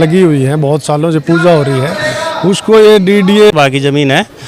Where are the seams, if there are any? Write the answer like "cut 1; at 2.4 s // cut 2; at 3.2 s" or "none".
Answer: cut 1; at 3.5 s